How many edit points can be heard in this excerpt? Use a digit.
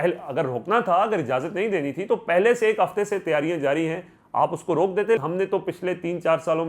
1